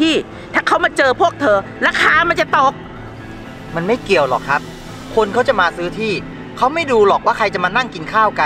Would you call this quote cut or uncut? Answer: uncut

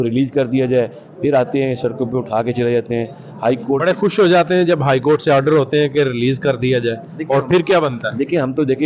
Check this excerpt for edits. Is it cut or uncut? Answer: uncut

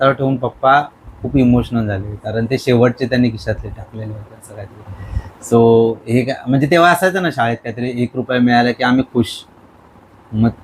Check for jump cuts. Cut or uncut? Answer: uncut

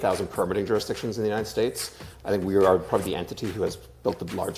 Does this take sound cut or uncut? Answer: uncut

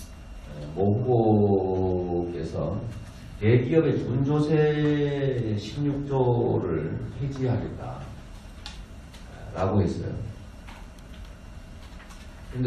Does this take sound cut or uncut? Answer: uncut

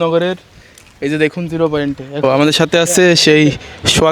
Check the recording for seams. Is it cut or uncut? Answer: cut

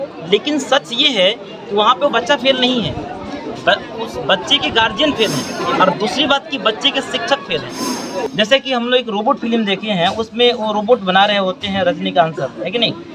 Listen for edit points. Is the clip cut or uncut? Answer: cut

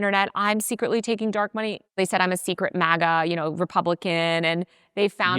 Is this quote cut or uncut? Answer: cut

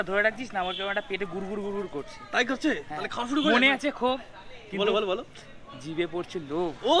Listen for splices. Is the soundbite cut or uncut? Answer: uncut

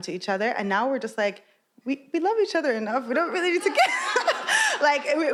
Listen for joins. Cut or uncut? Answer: uncut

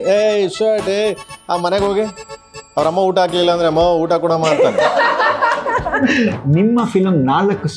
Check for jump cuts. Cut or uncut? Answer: cut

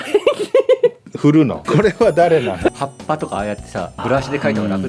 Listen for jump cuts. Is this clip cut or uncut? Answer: cut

